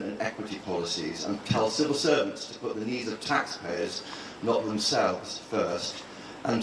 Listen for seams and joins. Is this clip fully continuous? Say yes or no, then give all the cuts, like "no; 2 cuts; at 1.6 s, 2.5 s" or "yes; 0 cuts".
no; 1 cut; at 1.5 s